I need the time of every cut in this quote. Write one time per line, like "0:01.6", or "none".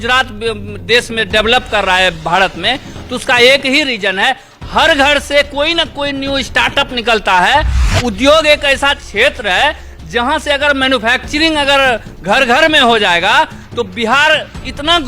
0:07.8